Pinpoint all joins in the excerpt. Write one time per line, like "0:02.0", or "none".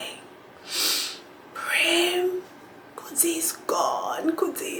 none